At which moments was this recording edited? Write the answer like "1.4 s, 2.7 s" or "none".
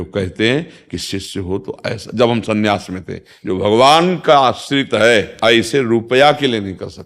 3.3 s, 5.3 s